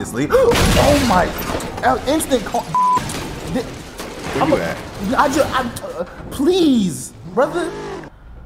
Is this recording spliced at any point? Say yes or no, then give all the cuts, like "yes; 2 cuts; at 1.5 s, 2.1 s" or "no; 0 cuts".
no; 0 cuts